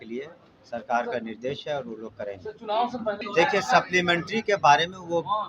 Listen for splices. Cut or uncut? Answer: cut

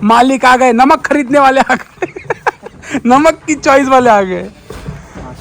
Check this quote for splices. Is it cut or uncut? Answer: uncut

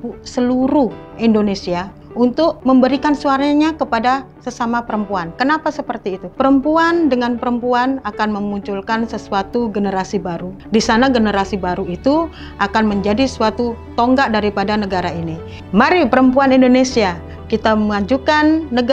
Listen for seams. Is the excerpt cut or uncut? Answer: cut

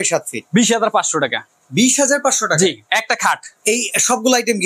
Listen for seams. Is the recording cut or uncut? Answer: cut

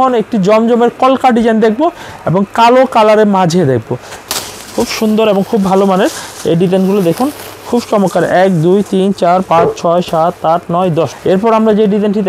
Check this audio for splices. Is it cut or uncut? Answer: cut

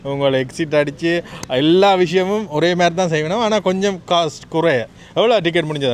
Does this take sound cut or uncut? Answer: uncut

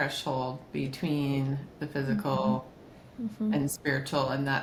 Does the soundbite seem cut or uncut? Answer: uncut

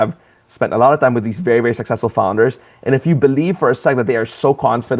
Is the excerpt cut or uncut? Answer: uncut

